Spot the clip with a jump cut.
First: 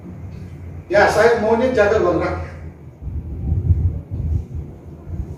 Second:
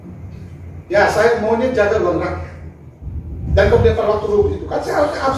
second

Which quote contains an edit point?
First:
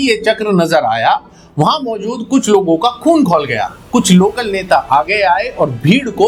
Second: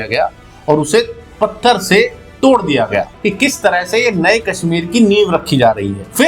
second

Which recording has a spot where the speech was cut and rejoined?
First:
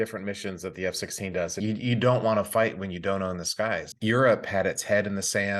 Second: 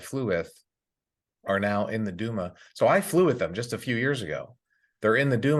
first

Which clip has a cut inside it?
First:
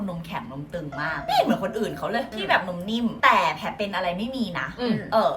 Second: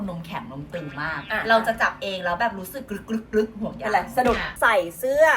second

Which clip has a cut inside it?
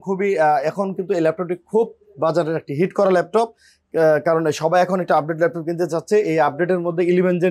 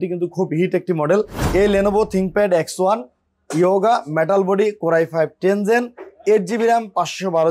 second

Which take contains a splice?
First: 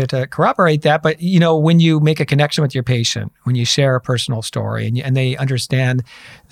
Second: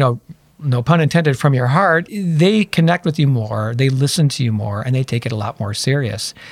second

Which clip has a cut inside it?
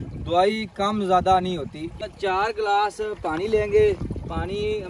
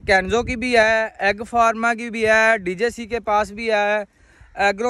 first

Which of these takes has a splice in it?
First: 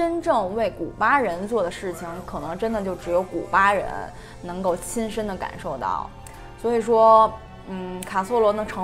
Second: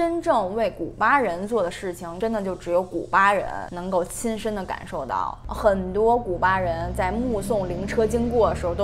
second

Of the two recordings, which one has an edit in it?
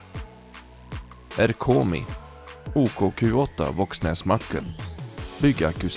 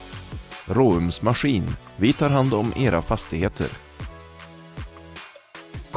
first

